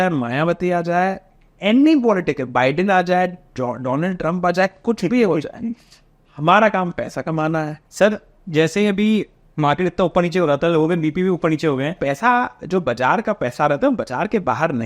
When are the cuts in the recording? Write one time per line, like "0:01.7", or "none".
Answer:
0:07.8
0:12.0